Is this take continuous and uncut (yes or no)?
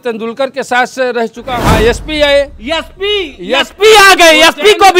no